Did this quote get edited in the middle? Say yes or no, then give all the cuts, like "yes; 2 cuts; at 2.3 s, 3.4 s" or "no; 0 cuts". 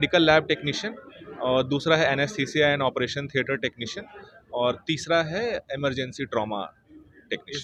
no; 0 cuts